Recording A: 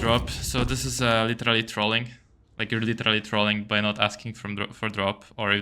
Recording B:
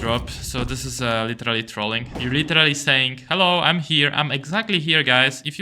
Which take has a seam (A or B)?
B